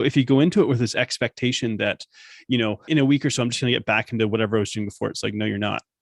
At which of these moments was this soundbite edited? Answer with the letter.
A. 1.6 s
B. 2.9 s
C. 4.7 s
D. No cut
B